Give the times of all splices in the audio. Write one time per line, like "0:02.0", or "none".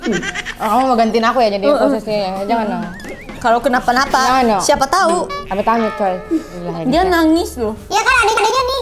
0:06.6